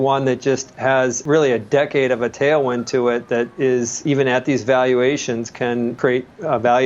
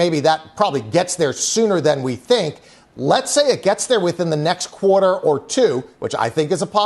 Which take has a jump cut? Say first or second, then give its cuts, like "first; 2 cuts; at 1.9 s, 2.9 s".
first; 3 cuts; at 1.2 s, 4.0 s, 6.0 s